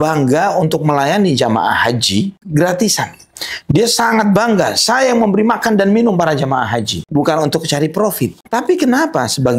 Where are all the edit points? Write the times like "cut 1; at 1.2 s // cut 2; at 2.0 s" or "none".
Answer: cut 1; at 2.4 s // cut 2; at 7.0 s // cut 3; at 8.4 s